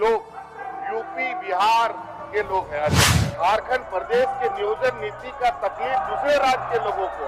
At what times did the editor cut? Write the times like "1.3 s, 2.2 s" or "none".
3.1 s